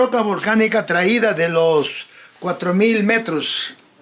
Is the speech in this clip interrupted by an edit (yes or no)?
no